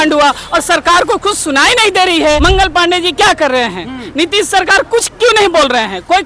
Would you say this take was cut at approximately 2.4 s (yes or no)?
yes